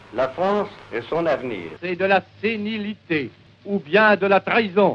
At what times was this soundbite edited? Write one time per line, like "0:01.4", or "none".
0:01.7
0:03.5

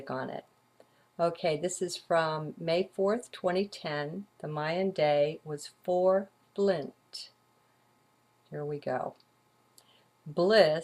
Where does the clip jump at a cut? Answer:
0:06.4

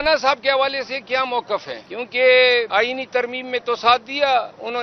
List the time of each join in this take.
0:01.8
0:02.7

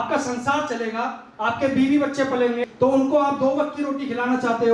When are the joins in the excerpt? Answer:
0:02.6

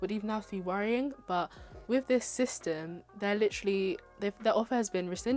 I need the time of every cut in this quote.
none

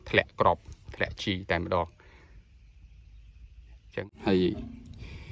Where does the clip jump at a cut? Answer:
0:04.2

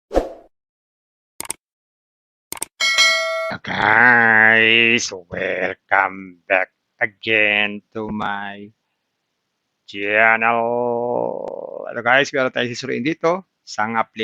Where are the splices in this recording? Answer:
0:03.5

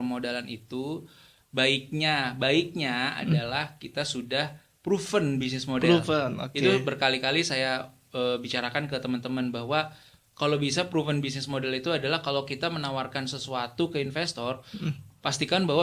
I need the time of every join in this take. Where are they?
none

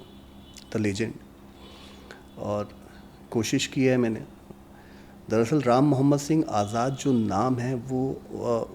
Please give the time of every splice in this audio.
none

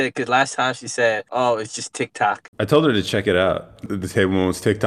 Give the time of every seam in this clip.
0:01.2
0:02.5
0:03.9

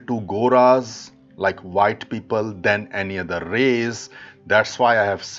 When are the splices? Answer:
none

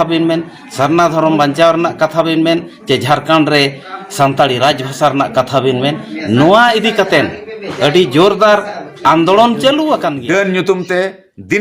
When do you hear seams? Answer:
0:10.1

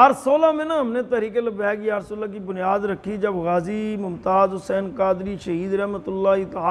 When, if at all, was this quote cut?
none

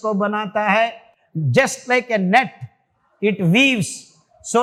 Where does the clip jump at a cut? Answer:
none

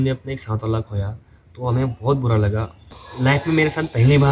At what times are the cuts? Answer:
0:03.0

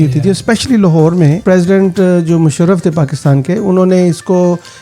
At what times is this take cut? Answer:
0:01.4

